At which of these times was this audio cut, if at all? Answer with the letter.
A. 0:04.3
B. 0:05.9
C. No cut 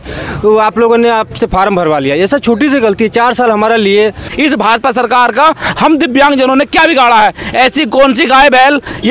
A